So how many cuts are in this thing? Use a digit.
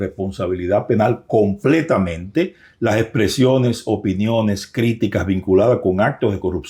0